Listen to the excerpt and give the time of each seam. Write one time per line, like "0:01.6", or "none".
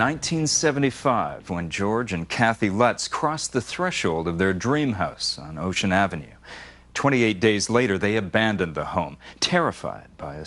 0:02.0